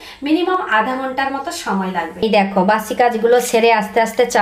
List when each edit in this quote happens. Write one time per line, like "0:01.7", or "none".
0:02.1